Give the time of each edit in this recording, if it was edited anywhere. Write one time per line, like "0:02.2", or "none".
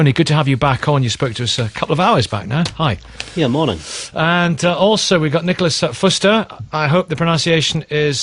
0:04.3